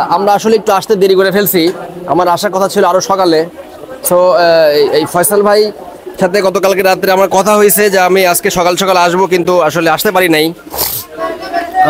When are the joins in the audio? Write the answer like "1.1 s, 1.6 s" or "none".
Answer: none